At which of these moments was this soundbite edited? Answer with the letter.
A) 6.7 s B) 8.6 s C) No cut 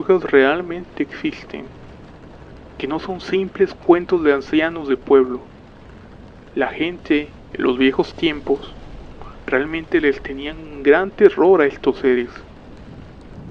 A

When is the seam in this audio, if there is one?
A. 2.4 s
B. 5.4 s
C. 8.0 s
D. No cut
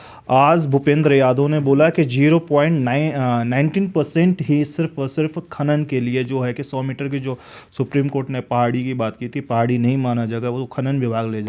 D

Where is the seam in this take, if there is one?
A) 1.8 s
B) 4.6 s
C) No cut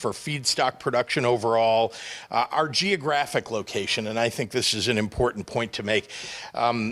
C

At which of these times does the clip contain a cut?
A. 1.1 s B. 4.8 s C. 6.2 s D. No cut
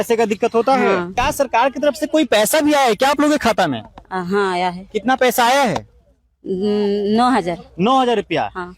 A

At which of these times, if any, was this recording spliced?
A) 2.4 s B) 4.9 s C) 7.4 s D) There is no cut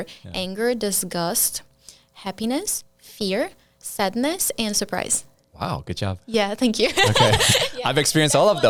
D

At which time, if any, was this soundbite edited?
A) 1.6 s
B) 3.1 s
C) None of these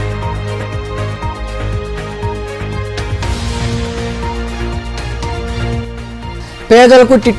B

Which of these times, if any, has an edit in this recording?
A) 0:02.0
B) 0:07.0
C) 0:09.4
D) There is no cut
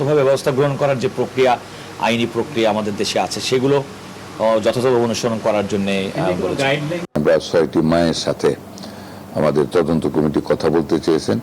B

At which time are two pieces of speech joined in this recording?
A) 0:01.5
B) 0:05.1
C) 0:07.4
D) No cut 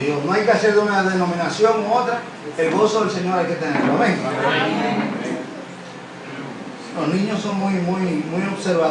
B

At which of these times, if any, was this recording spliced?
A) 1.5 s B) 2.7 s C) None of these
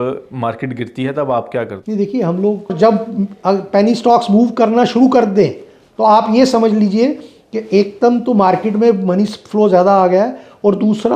B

